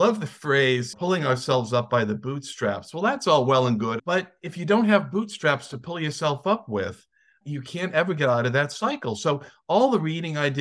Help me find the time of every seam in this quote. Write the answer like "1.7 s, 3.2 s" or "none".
0.9 s, 4.0 s